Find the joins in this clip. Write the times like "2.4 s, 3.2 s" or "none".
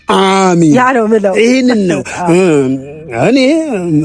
none